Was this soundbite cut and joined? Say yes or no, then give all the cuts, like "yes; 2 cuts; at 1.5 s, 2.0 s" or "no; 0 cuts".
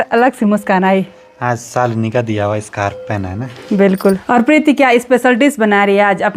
yes; 1 cut; at 4.2 s